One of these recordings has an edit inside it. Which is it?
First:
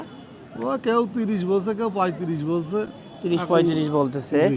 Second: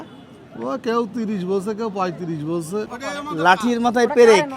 second; 1 cut; at 2.9 s

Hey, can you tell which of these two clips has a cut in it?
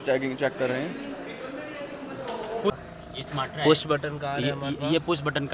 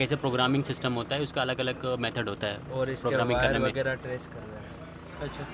first; 1 cut; at 2.7 s

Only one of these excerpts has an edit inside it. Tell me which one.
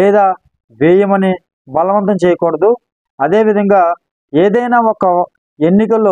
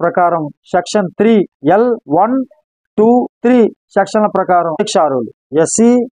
second; 3 cuts; at 2.0 s, 3.3 s, 5.1 s

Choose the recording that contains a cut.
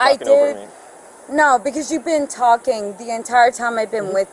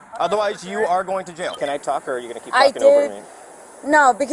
second; 1 cut; at 1.5 s

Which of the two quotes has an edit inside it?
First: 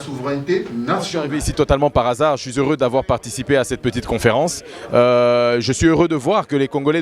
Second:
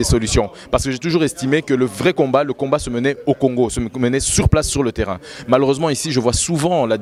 first; 1 cut; at 1.4 s

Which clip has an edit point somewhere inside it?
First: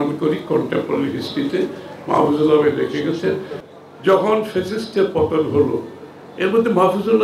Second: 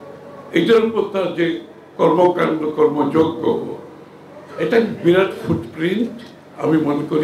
first; 1 cut; at 3.5 s

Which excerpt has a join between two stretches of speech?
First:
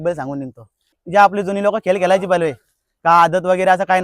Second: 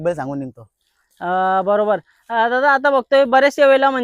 first; 1 cut; at 0.9 s

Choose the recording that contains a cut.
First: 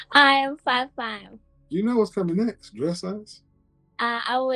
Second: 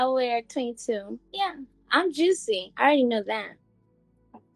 second; 1 cut; at 1.2 s

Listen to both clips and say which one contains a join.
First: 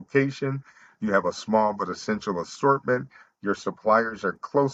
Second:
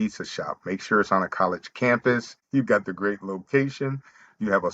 second; 1 cut; at 2.3 s

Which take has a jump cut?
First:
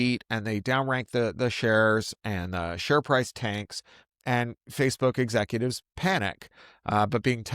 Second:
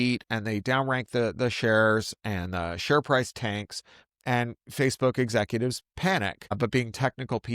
second; 1 cut; at 6.6 s

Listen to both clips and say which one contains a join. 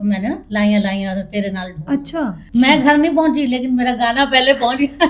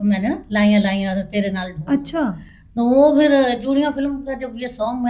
first; 1 cut; at 2.4 s

